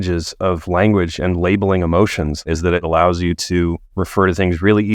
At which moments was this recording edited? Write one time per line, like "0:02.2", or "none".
0:02.8